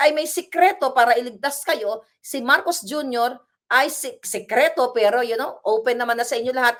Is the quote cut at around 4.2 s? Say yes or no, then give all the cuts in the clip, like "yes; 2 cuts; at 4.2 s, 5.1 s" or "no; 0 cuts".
no; 0 cuts